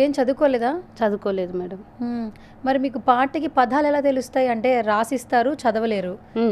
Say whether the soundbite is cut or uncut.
uncut